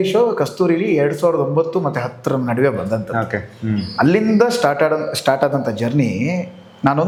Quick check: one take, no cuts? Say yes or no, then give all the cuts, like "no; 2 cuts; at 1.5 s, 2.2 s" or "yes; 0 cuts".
yes; 0 cuts